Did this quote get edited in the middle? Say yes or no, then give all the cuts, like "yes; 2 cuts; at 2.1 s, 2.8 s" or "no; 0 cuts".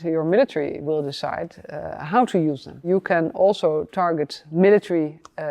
yes; 1 cut; at 2.9 s